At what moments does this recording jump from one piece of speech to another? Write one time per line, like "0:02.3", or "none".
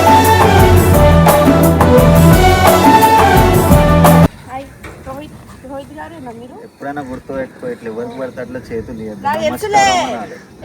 0:04.3